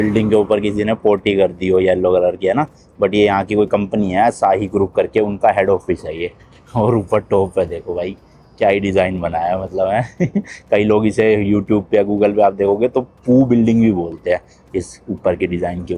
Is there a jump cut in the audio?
no; 0 cuts

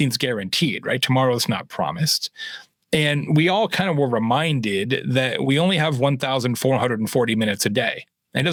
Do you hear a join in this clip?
no; 0 cuts

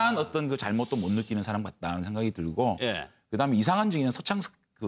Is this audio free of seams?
yes; 0 cuts

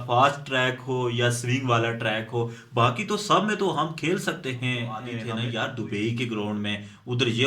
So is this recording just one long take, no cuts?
no; 1 cut; at 5.2 s

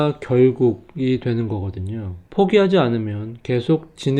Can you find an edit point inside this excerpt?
no; 0 cuts

